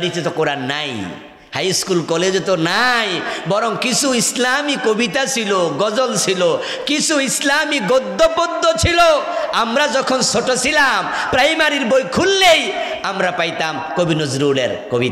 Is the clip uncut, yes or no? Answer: yes